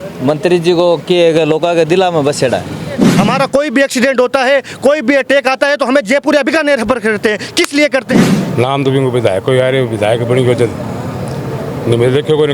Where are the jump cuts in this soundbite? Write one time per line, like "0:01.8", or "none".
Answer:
0:03.1
0:08.2